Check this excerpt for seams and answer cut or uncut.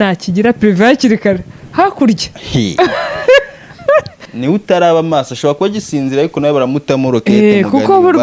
cut